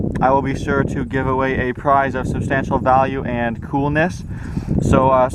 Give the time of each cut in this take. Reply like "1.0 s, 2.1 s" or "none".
1.2 s